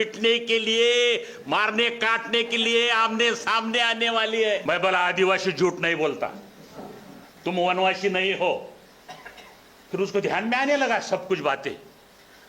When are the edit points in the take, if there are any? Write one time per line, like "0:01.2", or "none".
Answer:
0:04.6